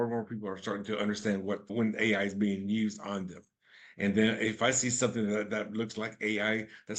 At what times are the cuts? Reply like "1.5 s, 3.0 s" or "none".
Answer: none